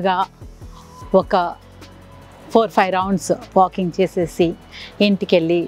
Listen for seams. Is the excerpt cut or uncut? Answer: uncut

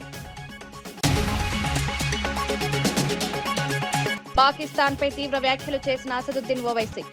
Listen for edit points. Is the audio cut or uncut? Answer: cut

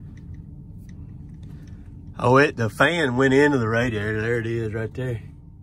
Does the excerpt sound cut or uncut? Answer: uncut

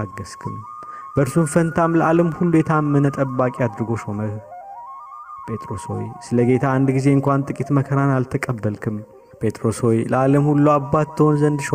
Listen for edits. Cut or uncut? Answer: uncut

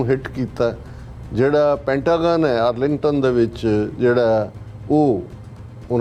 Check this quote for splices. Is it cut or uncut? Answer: uncut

